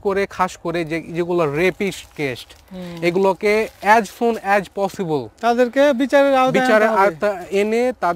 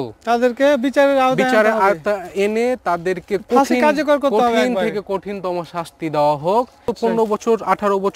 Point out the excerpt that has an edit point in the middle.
second; 1 cut; at 6.9 s

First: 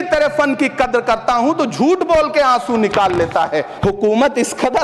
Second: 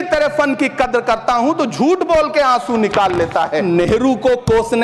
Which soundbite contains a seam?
first; 1 cut; at 3.6 s

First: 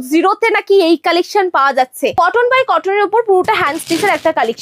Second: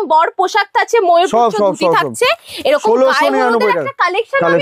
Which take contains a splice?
first; 1 cut; at 2.1 s

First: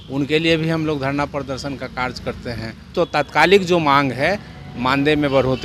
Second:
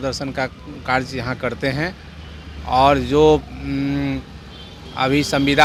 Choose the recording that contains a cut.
first; 1 cut; at 2.9 s

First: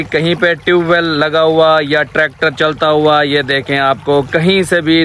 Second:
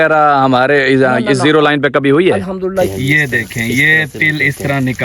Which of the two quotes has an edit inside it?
second; 1 cut; at 2.9 s

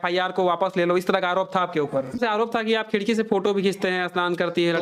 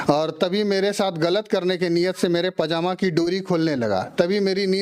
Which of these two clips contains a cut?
first; 1 cut; at 2.2 s

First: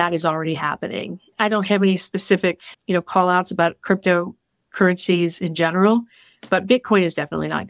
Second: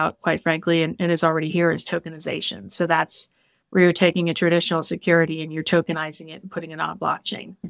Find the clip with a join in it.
first; 1 cut; at 1.3 s

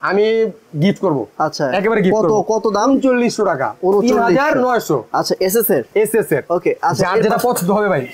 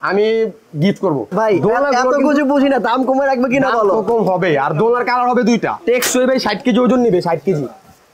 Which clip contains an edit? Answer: second; 2 cuts; at 1.3 s, 5.8 s

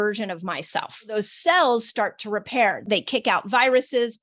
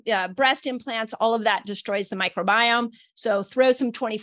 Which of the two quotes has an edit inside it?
first; 2 cuts; at 1.1 s, 2.8 s

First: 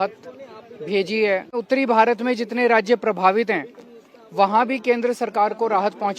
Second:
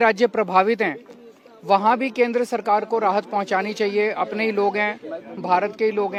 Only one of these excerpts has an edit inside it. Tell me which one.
first; 1 cut; at 1.6 s

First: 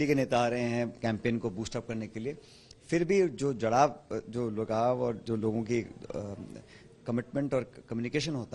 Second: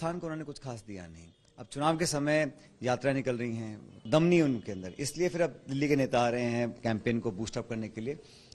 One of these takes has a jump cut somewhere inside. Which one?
second; 1 cut; at 3.9 s

